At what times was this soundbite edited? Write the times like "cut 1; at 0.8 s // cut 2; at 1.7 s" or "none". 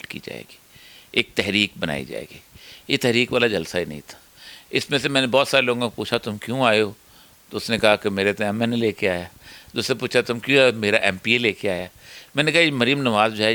none